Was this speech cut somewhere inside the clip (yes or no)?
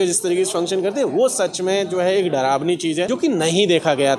yes